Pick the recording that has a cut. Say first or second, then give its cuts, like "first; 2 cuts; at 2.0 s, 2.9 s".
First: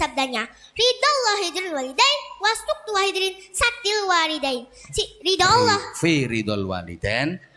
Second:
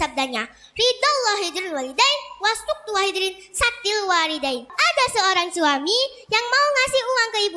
second; 1 cut; at 4.7 s